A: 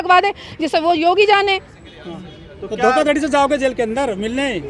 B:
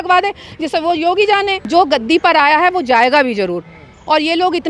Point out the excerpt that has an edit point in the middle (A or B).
B